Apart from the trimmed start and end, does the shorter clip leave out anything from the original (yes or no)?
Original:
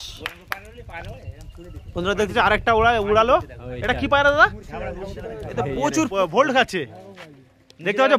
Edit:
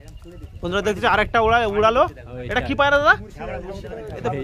no